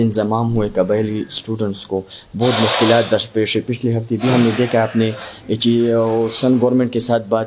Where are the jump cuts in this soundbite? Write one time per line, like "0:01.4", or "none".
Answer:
none